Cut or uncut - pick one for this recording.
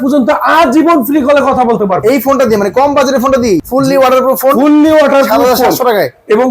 cut